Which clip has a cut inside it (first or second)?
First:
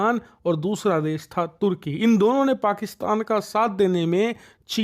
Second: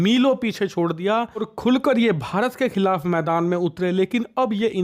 second